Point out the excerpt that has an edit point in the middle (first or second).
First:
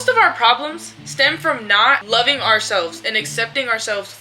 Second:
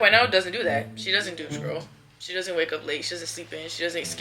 first